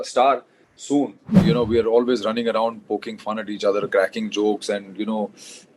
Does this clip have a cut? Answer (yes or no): yes